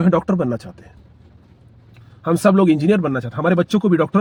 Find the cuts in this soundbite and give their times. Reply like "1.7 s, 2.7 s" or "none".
none